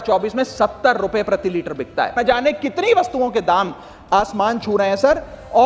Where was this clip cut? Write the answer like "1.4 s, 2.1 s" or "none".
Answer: 2.1 s